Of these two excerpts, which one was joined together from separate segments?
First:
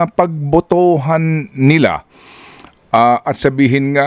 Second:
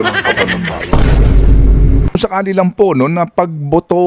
second; 1 cut; at 2.2 s

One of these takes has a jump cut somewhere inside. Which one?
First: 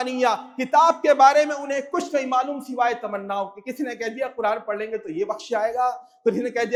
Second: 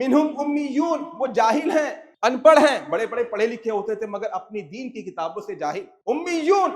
second; 2 cuts; at 2.0 s, 5.9 s

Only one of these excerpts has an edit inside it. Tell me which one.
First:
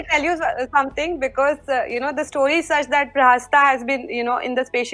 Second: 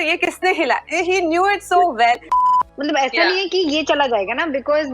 second; 1 cut; at 2.4 s

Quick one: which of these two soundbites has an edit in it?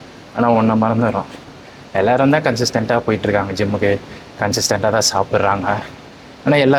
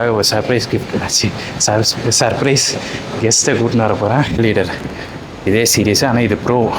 second; 1 cut; at 4.4 s

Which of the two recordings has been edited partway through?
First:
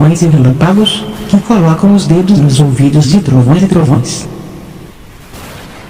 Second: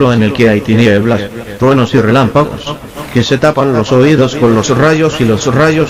first; 1 cut; at 4.8 s

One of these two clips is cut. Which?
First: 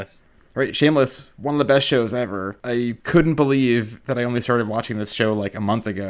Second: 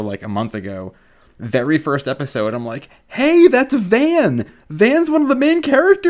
first; 3 cuts; at 1.3 s, 2.9 s, 4.0 s

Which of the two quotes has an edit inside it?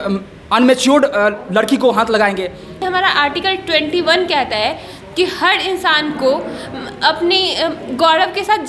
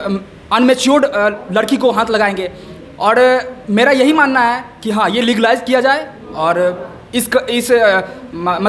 first; 1 cut; at 2.8 s

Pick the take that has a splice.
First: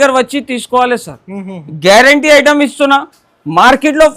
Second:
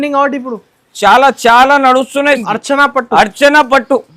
second; 1 cut; at 2.4 s

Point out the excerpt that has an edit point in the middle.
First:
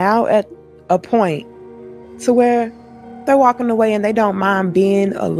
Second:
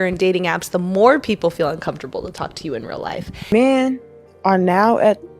second; 1 cut; at 3.5 s

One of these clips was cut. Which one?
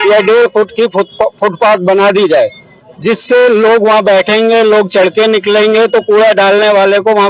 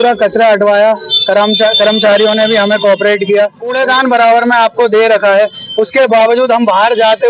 second; 1 cut; at 3.6 s

